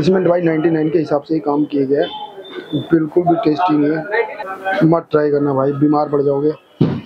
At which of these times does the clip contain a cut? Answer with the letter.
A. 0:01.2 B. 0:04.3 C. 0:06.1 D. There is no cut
B